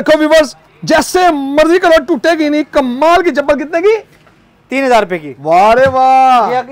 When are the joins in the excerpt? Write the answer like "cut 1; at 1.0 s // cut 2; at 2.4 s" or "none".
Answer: none